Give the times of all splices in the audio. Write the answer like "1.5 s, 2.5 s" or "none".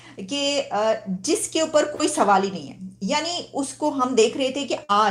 none